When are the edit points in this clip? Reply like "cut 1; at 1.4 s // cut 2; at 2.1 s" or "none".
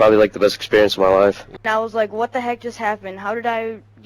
cut 1; at 1.5 s